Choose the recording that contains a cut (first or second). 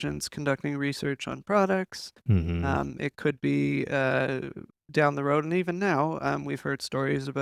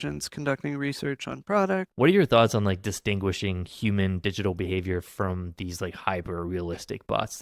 second